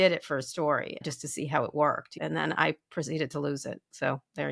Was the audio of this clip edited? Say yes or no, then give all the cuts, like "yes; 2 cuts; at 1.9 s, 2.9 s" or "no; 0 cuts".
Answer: yes; 2 cuts; at 1.0 s, 2.1 s